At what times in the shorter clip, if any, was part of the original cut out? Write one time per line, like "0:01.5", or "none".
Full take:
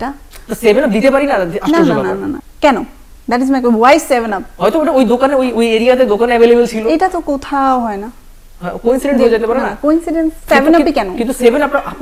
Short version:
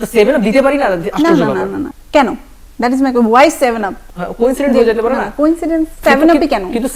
0:03.9